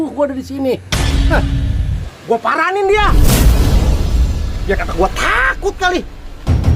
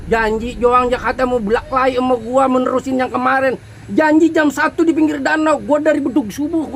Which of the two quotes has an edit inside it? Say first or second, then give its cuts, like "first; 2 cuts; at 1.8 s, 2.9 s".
first; 1 cut; at 2.0 s